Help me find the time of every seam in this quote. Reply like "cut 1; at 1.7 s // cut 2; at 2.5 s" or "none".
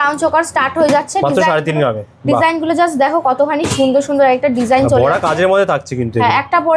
none